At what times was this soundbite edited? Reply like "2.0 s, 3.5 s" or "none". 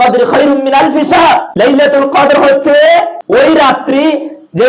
1.5 s, 3.5 s